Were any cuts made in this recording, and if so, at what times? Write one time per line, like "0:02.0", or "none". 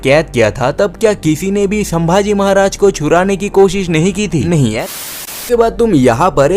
0:05.3